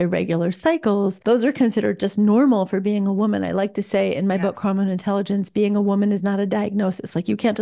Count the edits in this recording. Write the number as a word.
one